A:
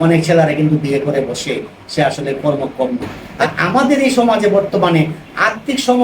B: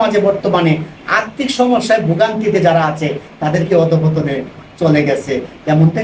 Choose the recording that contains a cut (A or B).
A